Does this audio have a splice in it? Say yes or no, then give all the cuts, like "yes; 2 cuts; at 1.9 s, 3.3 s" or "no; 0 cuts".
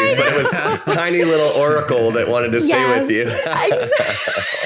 no; 0 cuts